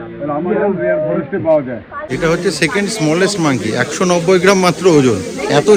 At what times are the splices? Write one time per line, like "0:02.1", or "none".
none

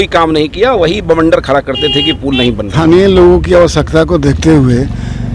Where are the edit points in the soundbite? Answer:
0:02.7

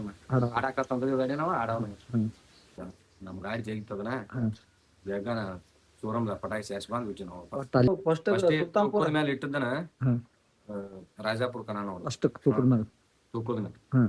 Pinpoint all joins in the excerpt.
0:02.8
0:07.9

